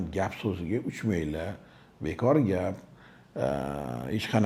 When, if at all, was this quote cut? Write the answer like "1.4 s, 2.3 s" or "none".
none